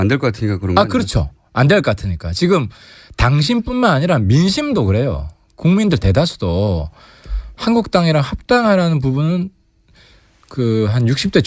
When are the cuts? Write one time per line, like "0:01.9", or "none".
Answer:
0:01.3